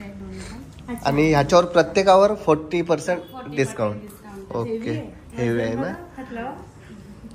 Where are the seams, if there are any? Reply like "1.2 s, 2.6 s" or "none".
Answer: none